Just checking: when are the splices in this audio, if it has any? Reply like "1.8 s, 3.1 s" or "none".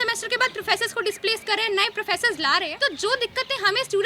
2.7 s